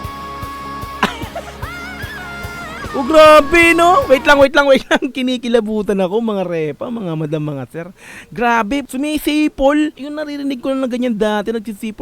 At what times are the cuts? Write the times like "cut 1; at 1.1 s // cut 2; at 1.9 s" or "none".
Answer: cut 1; at 8.9 s // cut 2; at 10.1 s